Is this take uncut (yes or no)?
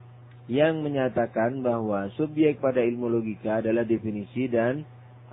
yes